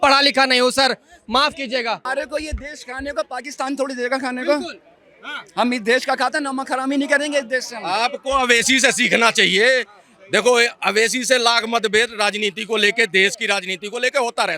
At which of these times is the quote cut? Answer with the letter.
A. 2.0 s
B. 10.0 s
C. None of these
A